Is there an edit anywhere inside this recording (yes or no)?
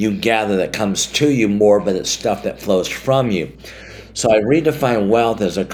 no